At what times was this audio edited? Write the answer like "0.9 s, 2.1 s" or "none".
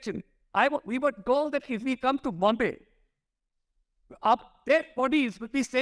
none